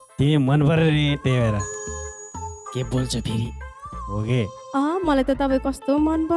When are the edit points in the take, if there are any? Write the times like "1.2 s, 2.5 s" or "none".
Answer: 4.7 s